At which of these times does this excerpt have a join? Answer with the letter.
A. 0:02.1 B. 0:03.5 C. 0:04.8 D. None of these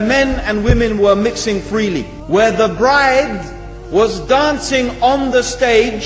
A